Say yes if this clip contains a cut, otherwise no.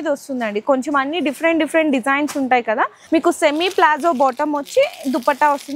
yes